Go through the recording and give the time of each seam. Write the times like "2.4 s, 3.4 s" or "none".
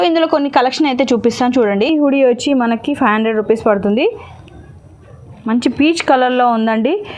1.9 s

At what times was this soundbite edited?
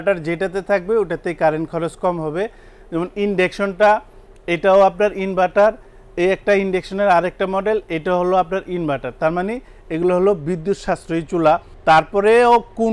none

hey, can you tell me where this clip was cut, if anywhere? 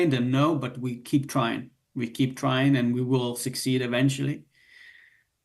none

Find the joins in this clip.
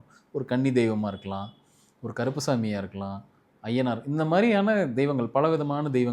none

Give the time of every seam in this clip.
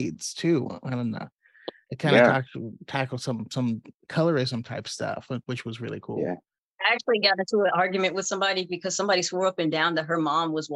7.1 s

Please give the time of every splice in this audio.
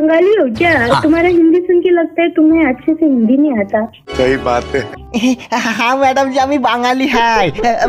none

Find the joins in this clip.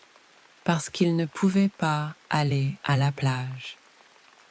3.6 s

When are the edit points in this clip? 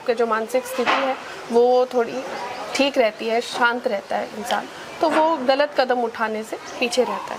none

